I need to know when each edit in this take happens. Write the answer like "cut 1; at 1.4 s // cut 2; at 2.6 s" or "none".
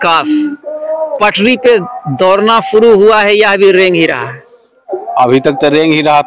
none

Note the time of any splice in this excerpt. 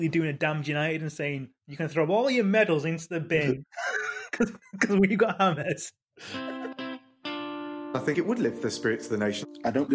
cut 1; at 6.3 s

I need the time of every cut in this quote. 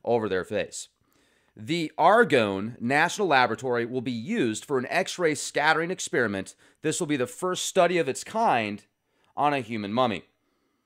none

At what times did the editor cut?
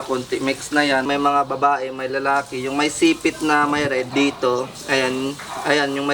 cut 1; at 1.1 s // cut 2; at 4.1 s

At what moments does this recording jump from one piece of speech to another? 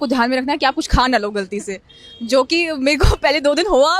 none

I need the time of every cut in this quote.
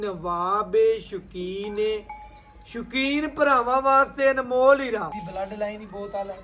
cut 1; at 5.2 s

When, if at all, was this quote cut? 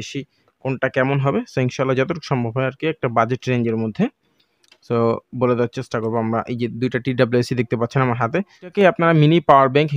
cut 1; at 8.7 s

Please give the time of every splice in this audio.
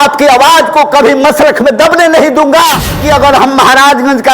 cut 1; at 3.1 s

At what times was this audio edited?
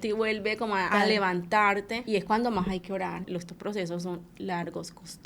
cut 1; at 0.9 s // cut 2; at 2.0 s // cut 3; at 3.3 s

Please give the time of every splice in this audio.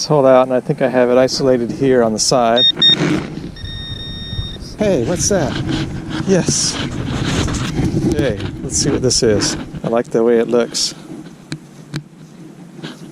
cut 1; at 2.7 s // cut 2; at 4.7 s // cut 3; at 9.7 s

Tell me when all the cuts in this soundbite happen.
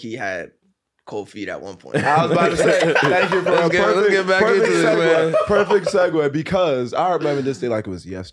none

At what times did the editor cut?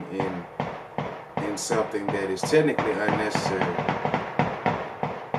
none

